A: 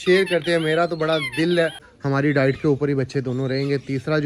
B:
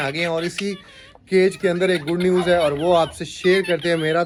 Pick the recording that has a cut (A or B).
A